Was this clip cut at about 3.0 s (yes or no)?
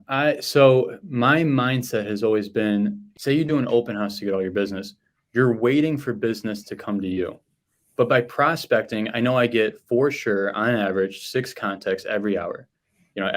yes